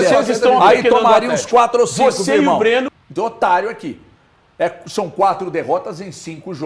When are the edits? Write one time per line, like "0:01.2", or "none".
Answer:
0:03.0